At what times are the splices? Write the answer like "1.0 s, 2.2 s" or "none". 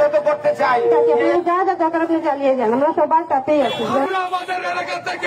1.3 s, 4.1 s